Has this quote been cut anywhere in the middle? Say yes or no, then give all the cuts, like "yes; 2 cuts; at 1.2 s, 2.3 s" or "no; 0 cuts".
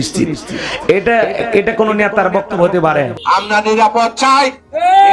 yes; 1 cut; at 3.5 s